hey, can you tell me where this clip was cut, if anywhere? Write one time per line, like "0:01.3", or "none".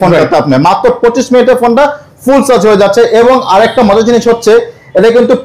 none